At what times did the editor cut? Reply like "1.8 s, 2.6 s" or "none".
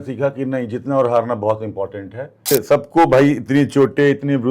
2.4 s